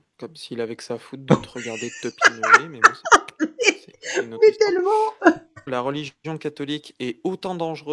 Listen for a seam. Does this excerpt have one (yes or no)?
yes